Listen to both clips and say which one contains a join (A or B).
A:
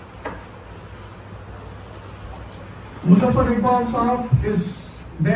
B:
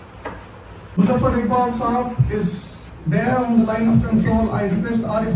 B